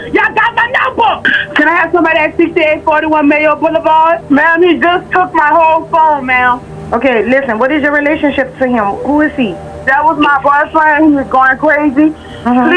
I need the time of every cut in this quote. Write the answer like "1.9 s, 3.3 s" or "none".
1.3 s, 4.2 s, 6.7 s